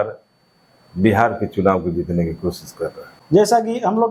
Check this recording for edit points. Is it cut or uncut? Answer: uncut